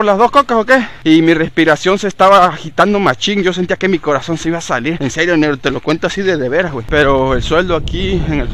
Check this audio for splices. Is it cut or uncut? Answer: cut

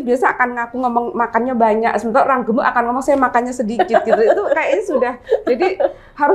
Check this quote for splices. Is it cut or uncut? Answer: uncut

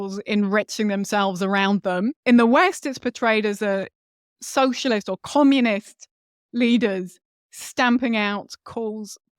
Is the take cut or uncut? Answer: cut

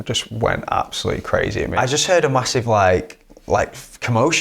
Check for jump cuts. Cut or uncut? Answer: cut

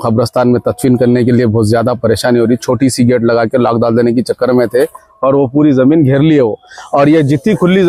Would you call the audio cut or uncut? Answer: uncut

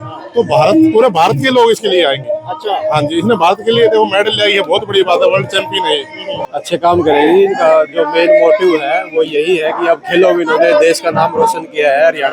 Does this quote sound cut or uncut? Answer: cut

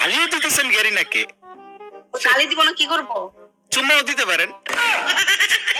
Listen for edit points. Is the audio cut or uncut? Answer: uncut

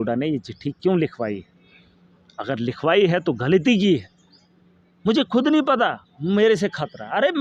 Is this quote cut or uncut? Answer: uncut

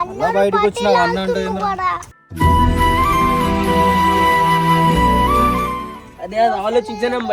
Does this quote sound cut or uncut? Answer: cut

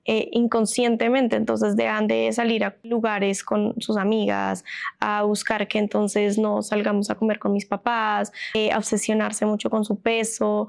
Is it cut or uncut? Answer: cut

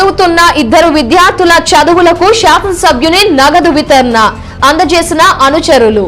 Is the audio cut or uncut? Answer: uncut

